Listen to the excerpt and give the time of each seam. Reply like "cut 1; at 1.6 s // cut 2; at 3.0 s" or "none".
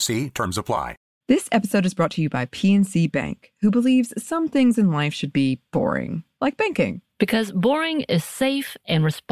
cut 1; at 1.1 s